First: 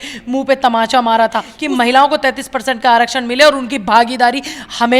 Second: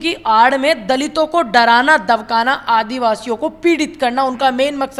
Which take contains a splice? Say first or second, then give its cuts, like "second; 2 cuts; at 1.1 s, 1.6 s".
first; 1 cut; at 1.5 s